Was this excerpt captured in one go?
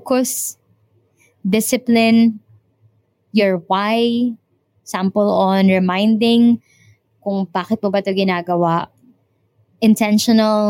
yes; 0 cuts

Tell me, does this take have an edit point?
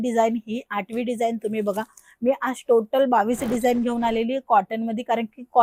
no; 0 cuts

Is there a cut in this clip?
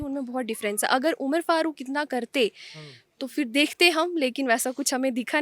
no; 0 cuts

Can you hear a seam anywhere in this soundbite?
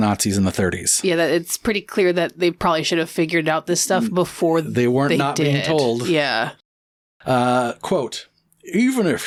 no; 0 cuts

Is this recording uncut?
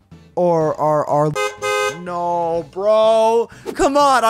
yes; 0 cuts

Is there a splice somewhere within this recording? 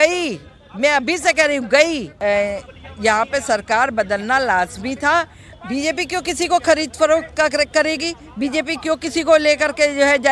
yes; 2 cuts; at 2.1 s, 5.4 s

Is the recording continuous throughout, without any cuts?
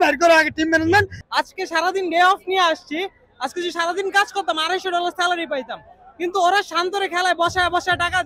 no; 1 cut; at 1.2 s

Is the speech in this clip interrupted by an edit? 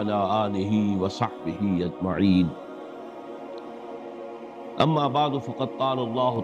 yes; 2 cuts; at 2.5 s, 4.1 s

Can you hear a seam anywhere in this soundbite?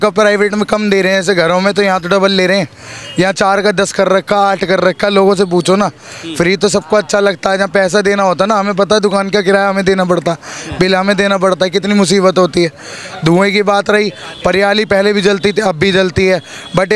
no; 0 cuts

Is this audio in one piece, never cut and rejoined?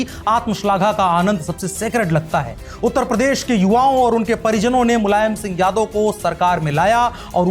no; 1 cut; at 2.6 s

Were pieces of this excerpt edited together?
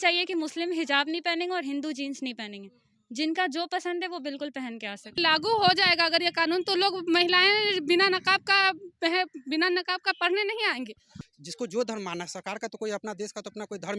yes; 2 cuts; at 5.2 s, 11.2 s

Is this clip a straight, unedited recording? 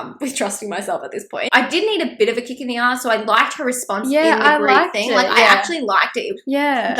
no; 1 cut; at 1.5 s

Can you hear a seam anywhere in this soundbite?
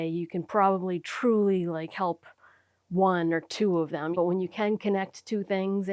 yes; 1 cut; at 4.1 s

